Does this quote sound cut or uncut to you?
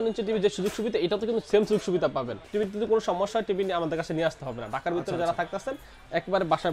cut